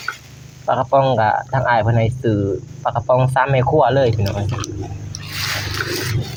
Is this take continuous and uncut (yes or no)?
yes